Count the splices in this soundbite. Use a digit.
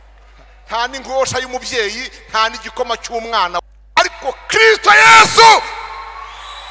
1